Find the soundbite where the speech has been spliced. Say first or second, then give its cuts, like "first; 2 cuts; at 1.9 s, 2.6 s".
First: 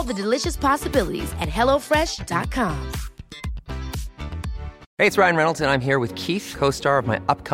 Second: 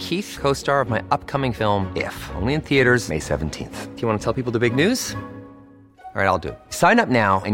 first; 1 cut; at 4.8 s